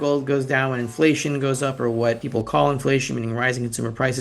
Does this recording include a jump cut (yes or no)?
yes